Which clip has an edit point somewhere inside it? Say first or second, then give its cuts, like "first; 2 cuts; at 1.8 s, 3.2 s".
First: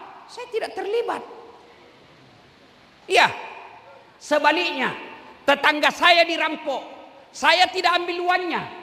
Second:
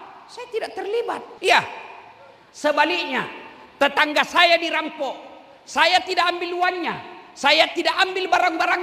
second; 1 cut; at 1.3 s